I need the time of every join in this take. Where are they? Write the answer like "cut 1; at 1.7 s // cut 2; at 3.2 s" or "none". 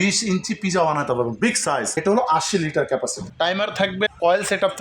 cut 1; at 1.9 s // cut 2; at 3.2 s